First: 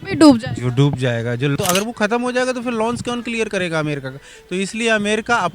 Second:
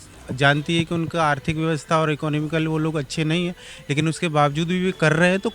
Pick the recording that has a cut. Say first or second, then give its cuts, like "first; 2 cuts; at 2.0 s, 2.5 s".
first; 1 cut; at 1.5 s